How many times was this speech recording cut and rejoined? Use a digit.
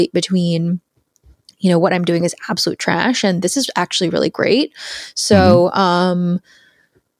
0